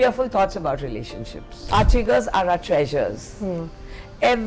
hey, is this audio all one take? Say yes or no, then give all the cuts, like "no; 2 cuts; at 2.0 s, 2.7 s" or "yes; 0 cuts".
no; 1 cut; at 1.7 s